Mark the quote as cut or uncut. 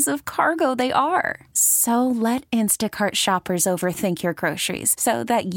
uncut